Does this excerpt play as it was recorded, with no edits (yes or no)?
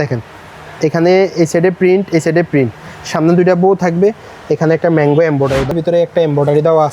no